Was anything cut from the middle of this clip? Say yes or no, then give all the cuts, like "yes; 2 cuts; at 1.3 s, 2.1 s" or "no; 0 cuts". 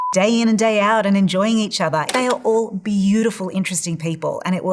yes; 1 cut; at 2.1 s